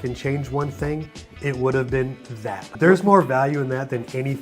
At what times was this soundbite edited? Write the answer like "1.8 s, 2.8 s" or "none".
2.6 s